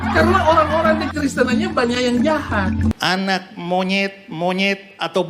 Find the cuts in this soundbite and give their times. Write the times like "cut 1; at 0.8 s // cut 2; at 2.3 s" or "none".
cut 1; at 3.0 s